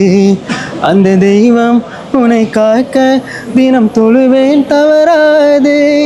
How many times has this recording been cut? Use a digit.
0